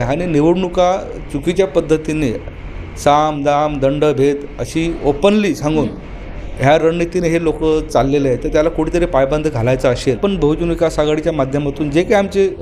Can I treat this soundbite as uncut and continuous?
no; 1 cut; at 10.2 s

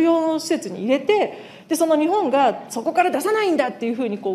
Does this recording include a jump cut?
no; 0 cuts

